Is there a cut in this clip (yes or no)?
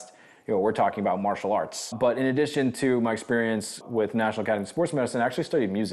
yes